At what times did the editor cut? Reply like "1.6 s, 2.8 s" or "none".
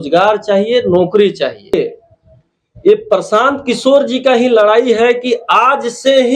1.7 s